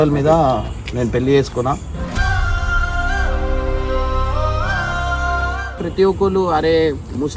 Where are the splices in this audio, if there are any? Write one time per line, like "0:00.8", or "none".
0:05.8

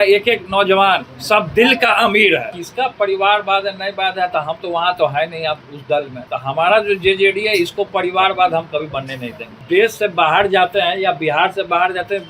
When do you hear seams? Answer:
0:02.6
0:06.2
0:09.5

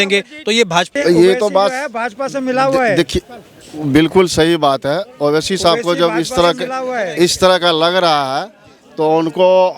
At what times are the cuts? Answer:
0:00.9

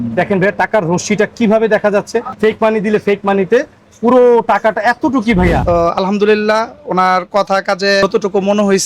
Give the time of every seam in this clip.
0:02.3
0:05.6

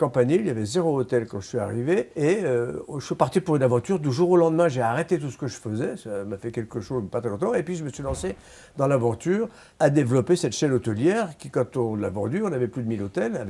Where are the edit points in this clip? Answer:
0:02.1
0:09.6

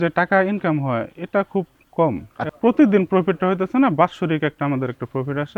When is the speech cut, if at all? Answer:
0:02.5

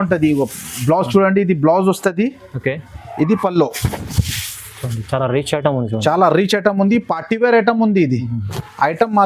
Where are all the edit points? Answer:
none

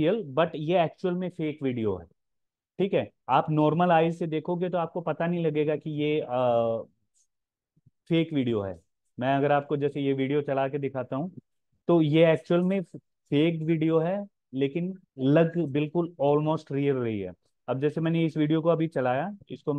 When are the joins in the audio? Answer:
0:15.0

